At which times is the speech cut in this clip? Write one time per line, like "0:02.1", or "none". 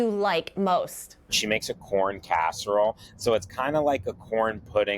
0:00.9

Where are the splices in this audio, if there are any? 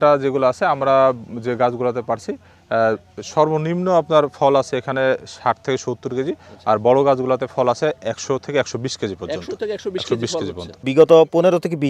0:10.9

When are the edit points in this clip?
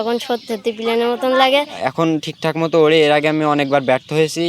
0:01.7

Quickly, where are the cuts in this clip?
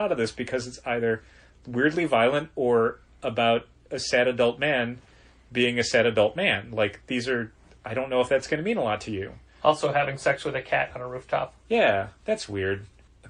none

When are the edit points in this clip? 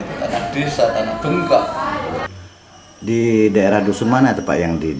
0:02.4

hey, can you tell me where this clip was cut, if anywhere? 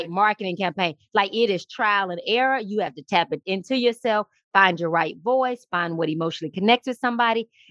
none

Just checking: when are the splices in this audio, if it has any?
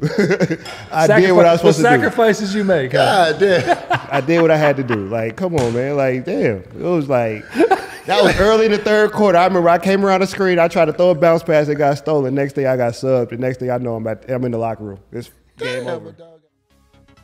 0:16.2

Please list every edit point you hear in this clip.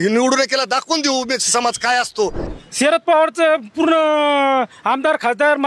0:02.5

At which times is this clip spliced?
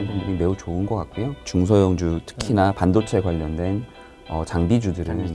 0:01.4

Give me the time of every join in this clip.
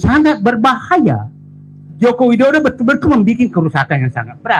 0:01.9

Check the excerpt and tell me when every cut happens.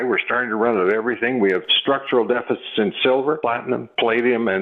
0:01.7
0:03.4

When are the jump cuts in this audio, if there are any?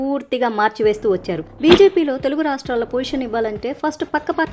0:01.5

